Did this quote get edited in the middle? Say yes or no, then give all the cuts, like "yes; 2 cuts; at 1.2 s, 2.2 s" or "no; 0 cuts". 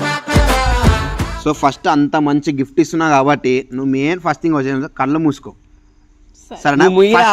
no; 0 cuts